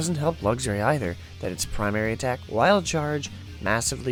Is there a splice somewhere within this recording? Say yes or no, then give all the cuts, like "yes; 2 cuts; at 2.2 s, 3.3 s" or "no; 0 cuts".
no; 0 cuts